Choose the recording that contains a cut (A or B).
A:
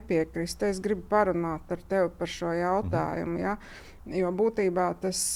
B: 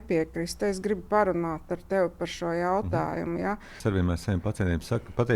B